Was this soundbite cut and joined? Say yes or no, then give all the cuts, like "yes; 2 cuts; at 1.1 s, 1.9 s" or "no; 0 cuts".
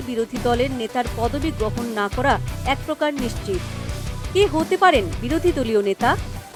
no; 0 cuts